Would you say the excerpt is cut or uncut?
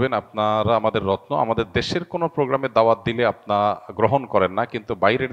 uncut